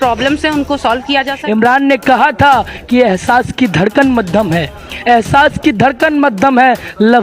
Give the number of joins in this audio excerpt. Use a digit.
1